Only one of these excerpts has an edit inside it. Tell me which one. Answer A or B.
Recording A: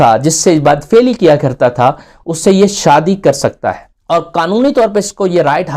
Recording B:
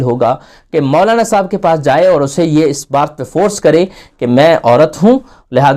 A